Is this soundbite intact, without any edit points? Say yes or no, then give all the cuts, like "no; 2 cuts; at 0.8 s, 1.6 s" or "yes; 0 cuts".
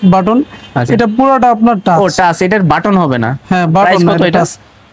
yes; 0 cuts